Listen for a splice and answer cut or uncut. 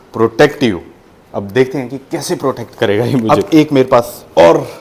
cut